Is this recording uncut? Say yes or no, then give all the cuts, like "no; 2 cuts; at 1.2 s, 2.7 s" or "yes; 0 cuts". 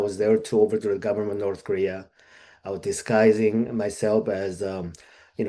yes; 0 cuts